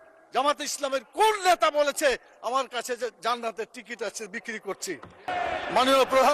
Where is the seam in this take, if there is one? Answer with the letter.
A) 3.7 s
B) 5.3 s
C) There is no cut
B